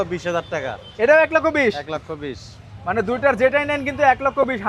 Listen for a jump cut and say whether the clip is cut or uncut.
uncut